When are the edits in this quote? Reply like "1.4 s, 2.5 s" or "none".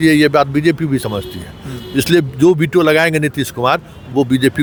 none